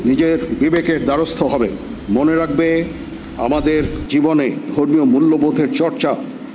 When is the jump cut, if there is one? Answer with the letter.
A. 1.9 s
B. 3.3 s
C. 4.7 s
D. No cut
A